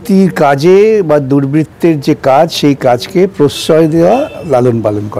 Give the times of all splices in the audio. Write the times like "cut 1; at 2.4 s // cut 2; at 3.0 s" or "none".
none